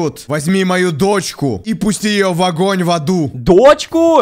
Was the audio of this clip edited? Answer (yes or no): no